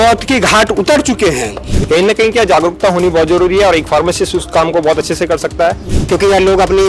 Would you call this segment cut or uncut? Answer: cut